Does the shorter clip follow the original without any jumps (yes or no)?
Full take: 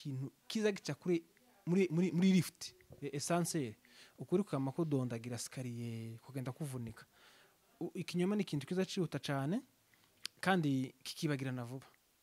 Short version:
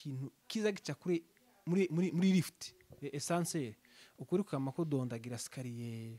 yes